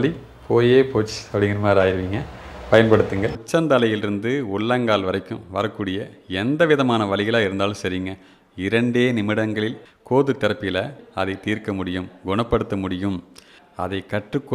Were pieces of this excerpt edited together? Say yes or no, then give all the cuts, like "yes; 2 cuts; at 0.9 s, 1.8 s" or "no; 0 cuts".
yes; 1 cut; at 3.3 s